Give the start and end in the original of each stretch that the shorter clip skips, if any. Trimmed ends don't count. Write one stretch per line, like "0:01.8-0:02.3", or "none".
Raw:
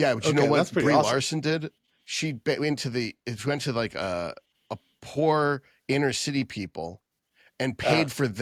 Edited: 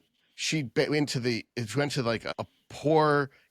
0:04.0-0:04.6